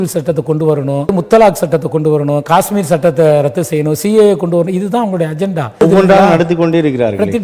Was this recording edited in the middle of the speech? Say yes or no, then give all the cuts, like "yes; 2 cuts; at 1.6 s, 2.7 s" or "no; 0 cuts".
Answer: yes; 2 cuts; at 1.1 s, 5.8 s